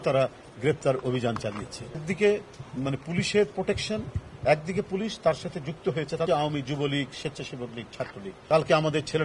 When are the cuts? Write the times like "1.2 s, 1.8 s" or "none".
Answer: 2.1 s, 6.3 s, 8.3 s

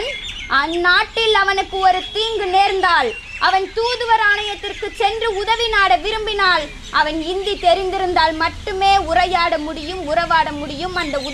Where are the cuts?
none

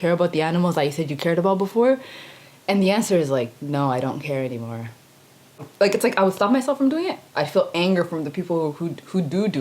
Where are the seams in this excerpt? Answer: 5.7 s

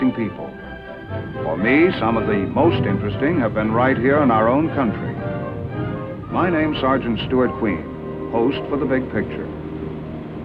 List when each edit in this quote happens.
7.2 s

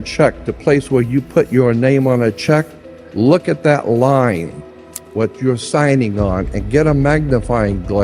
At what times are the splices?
none

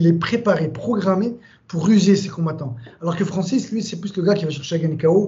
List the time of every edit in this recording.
none

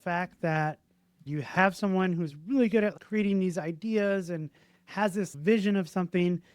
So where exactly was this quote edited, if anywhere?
1.3 s, 3.0 s, 5.3 s

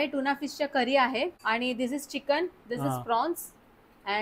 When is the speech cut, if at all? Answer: 1.4 s

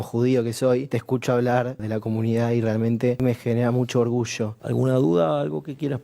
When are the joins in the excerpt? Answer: 0.9 s, 1.8 s, 3.2 s, 4.6 s

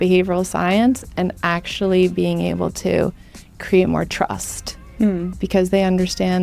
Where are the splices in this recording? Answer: none

